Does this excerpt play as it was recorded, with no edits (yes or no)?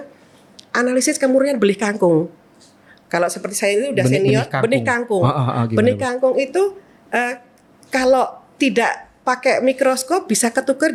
yes